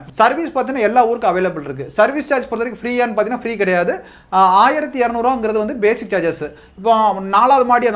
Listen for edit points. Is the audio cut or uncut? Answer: uncut